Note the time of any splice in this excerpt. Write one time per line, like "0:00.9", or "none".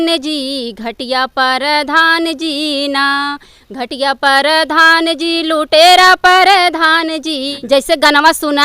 0:07.5